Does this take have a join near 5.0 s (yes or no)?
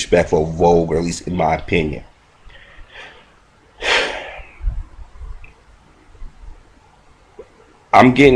yes